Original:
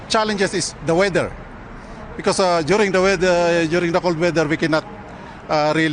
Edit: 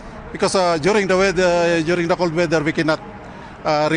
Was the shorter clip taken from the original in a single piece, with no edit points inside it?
yes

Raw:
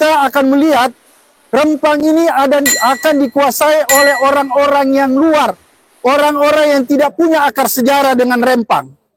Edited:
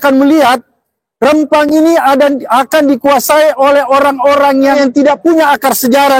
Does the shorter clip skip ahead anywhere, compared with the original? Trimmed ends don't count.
yes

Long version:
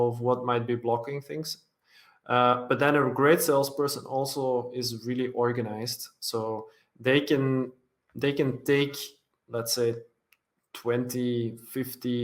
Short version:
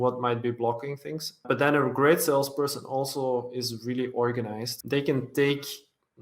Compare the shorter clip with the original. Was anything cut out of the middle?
yes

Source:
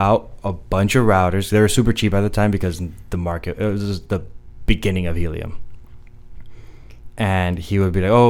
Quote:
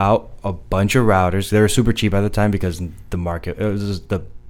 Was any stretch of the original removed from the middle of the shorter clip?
no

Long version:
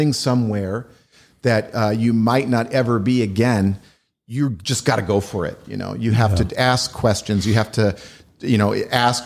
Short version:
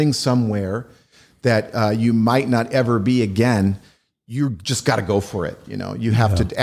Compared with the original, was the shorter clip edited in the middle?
no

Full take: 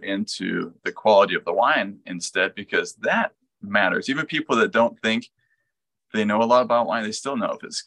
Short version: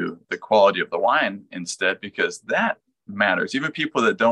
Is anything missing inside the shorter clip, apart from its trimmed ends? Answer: no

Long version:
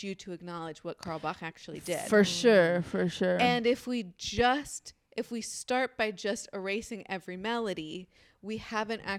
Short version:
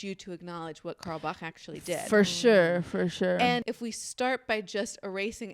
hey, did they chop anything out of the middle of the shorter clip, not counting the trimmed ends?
yes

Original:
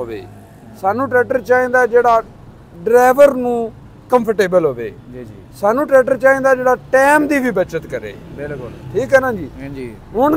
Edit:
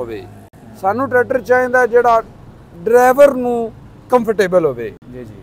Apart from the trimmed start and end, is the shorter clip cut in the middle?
no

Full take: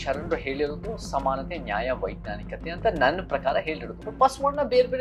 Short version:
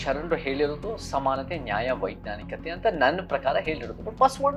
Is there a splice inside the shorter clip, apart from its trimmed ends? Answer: no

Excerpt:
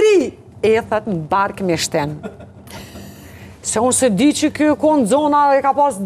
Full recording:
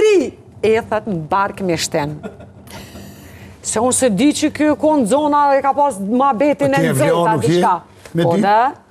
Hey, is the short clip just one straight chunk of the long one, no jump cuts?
yes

